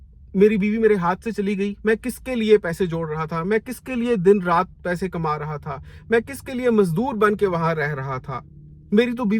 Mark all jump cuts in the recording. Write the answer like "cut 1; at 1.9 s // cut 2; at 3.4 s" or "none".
none